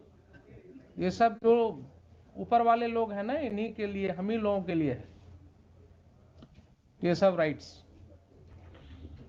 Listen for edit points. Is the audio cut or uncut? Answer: uncut